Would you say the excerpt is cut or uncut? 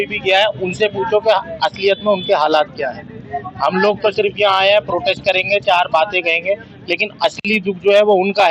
uncut